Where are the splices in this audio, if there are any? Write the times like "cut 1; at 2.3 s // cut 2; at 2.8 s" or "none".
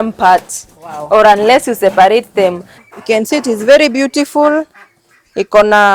cut 1; at 2.7 s